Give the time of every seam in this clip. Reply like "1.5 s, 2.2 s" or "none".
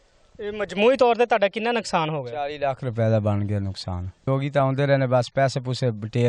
4.2 s